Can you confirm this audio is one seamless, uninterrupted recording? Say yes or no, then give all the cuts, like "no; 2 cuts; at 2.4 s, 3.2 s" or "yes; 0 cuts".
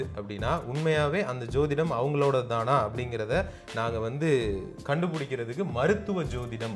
yes; 0 cuts